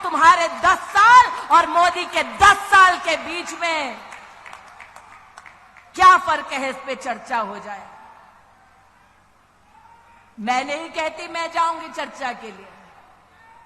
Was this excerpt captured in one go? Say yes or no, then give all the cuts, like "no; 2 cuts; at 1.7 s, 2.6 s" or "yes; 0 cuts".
yes; 0 cuts